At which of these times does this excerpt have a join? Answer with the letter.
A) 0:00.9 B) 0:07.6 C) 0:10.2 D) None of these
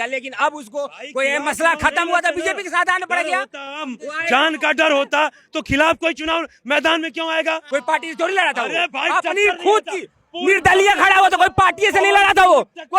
B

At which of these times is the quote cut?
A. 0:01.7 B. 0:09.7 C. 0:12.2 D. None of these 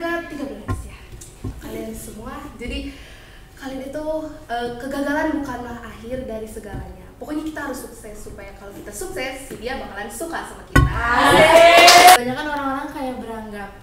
C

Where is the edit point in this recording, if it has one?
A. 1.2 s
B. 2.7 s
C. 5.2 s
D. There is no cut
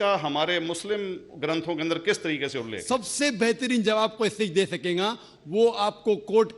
B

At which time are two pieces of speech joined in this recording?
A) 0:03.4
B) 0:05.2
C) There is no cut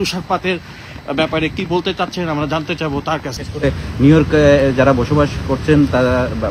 A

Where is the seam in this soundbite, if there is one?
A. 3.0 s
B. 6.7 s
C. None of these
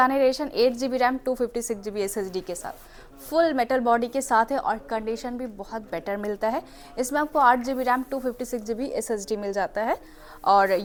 C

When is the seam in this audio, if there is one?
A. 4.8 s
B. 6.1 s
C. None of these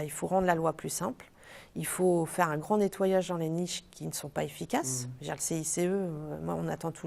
C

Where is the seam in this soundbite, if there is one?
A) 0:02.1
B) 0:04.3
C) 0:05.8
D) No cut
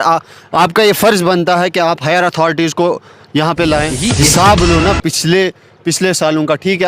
B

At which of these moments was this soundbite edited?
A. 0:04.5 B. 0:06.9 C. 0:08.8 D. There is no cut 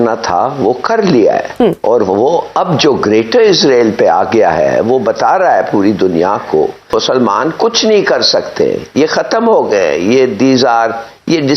B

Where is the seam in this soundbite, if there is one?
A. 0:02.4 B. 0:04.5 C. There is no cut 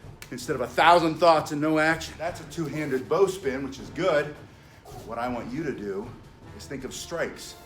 A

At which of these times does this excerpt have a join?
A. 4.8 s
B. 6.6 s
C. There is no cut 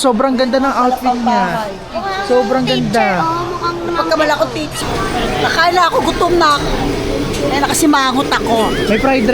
A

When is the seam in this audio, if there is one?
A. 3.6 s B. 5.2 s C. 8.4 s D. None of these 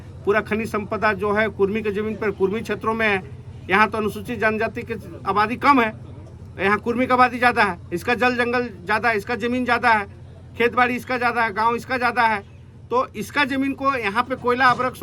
D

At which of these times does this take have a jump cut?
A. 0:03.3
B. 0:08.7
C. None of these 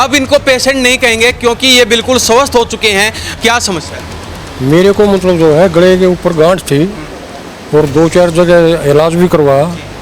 A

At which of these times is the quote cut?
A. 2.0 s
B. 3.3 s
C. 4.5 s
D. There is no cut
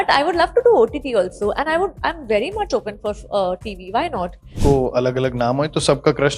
C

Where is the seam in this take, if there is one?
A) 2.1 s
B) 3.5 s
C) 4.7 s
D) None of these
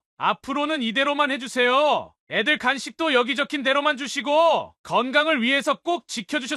D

